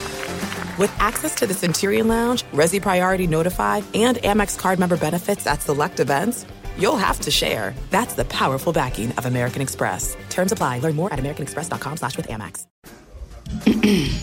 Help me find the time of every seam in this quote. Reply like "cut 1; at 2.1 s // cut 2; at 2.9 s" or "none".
cut 1; at 12.6 s